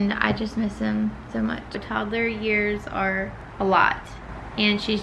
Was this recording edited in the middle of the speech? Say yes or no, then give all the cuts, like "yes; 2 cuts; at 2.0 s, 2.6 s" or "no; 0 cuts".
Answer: yes; 1 cut; at 1.7 s